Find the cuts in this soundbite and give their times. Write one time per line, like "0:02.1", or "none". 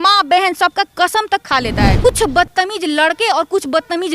0:02.0